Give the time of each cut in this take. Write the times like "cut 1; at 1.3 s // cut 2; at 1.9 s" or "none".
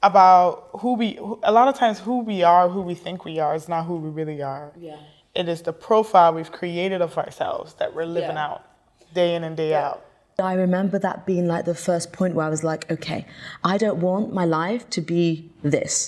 cut 1; at 10.4 s